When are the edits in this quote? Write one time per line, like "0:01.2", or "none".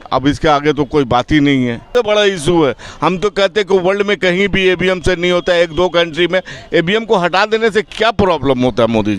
0:01.9